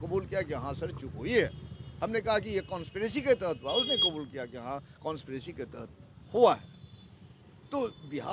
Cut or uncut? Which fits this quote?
uncut